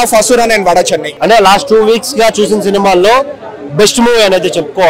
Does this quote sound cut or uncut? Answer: cut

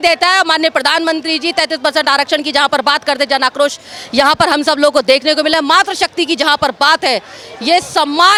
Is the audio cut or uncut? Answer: uncut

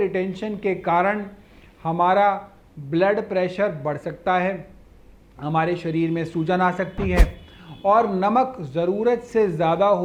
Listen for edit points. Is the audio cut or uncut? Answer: uncut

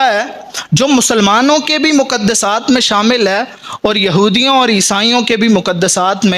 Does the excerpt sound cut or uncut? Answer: uncut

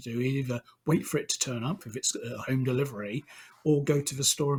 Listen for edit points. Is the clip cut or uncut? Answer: uncut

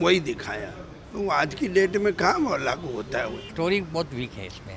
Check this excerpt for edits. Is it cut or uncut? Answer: cut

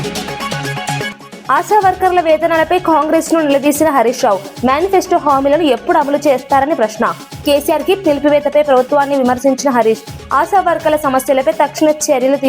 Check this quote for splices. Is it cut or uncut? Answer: cut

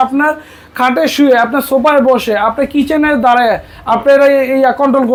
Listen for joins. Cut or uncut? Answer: uncut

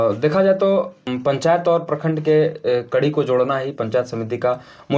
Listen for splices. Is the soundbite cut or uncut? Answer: cut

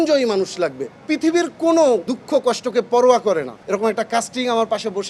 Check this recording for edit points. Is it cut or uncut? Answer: cut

